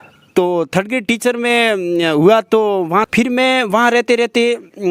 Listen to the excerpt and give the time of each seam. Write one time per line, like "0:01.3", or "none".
0:03.1